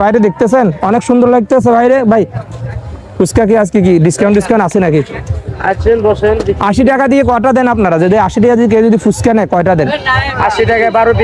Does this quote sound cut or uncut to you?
uncut